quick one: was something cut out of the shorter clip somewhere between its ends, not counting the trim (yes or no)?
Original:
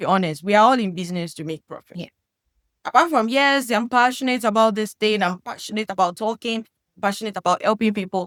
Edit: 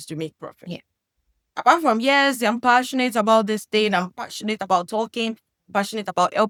no